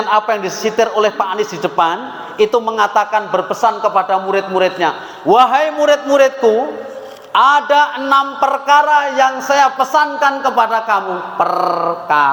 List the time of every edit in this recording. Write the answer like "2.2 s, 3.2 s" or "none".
none